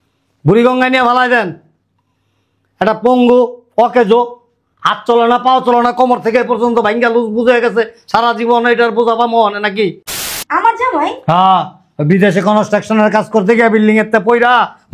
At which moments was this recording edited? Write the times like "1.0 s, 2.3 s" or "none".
10.2 s